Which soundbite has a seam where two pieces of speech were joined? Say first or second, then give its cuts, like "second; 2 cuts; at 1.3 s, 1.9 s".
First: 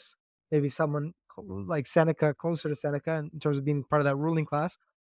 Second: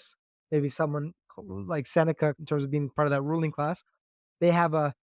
second; 1 cut; at 2.4 s